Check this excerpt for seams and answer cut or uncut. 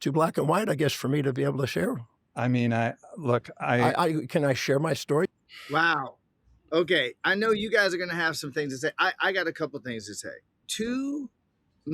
cut